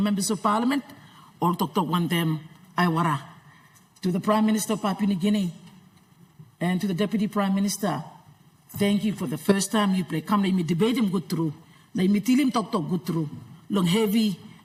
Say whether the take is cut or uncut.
uncut